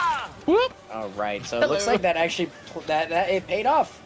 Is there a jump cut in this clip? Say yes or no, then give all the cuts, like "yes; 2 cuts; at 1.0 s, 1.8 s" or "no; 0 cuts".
no; 0 cuts